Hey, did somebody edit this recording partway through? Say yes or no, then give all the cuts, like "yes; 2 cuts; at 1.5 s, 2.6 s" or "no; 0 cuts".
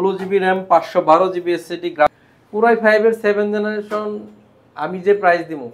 yes; 1 cut; at 2.2 s